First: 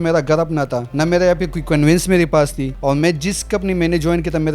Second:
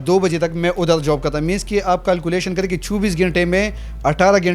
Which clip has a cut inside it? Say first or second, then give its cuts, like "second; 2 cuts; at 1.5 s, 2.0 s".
first; 2 cuts; at 0.9 s, 2.7 s